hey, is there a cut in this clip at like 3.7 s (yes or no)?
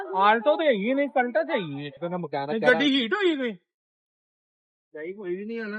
no